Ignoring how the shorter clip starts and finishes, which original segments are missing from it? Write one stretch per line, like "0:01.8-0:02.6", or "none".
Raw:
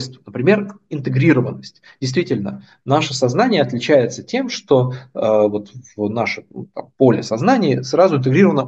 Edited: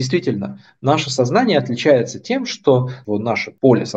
0:05.1-0:06.4